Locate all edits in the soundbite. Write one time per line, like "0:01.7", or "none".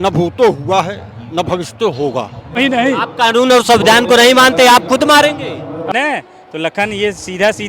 0:02.6
0:05.9